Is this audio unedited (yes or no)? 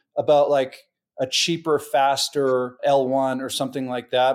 no